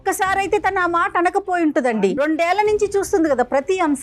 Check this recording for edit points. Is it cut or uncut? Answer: cut